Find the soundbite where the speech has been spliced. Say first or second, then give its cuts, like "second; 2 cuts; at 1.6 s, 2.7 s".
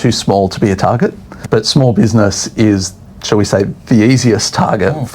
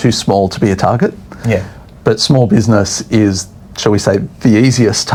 first; 1 cut; at 1.3 s